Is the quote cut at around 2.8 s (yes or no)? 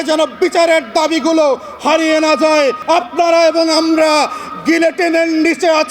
yes